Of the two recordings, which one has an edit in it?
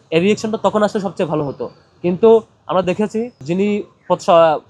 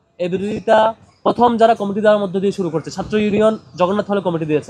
first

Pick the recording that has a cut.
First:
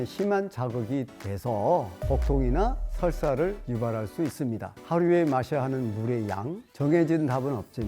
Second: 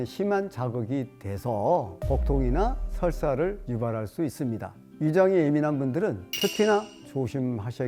first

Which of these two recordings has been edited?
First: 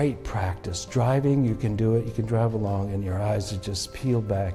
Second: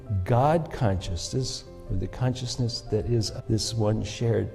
second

